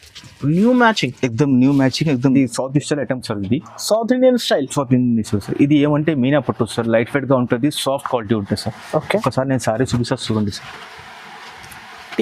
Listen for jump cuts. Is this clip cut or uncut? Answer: cut